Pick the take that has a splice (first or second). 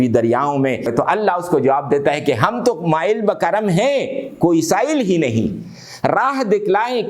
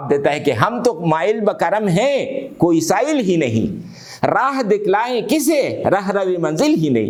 first